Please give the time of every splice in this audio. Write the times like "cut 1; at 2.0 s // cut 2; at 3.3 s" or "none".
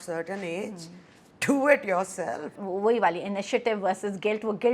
cut 1; at 2.6 s